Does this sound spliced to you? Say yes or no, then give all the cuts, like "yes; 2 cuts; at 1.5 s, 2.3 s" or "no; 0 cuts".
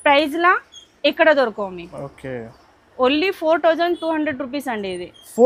no; 0 cuts